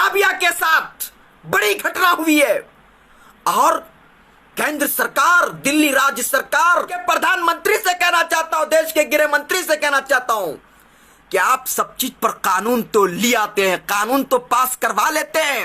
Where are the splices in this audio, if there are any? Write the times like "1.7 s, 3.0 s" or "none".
7.0 s